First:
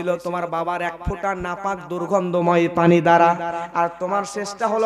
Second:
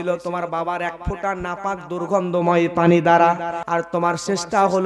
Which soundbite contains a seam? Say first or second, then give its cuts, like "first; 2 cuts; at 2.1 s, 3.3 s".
second; 1 cut; at 3.6 s